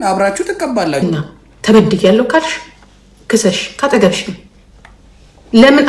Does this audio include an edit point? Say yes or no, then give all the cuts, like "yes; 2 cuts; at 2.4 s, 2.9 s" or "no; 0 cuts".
yes; 1 cut; at 1.0 s